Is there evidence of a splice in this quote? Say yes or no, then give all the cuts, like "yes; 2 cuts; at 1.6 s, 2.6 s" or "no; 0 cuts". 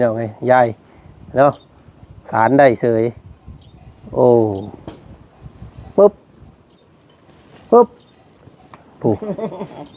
no; 0 cuts